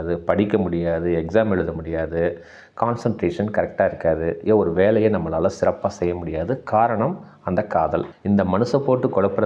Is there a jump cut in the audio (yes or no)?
yes